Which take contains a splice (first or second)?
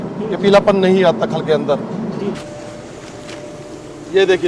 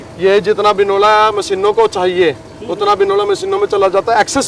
first